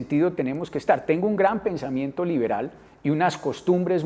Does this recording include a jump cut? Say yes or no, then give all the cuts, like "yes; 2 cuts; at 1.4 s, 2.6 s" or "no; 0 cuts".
no; 0 cuts